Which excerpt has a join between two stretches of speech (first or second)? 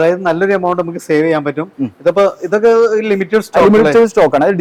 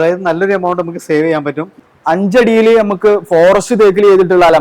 second